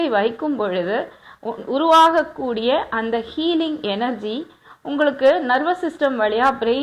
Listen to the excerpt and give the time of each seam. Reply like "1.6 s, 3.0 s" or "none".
none